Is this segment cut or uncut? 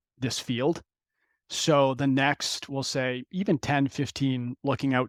uncut